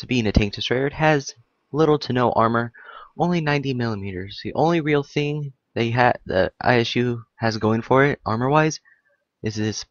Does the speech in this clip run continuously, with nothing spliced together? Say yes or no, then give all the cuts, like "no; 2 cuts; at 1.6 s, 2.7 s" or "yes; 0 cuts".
yes; 0 cuts